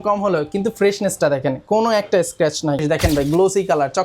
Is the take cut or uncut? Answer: cut